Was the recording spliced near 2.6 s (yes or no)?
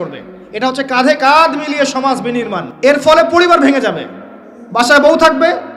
yes